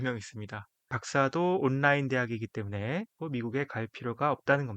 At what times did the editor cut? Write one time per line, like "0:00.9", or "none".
0:01.0
0:03.2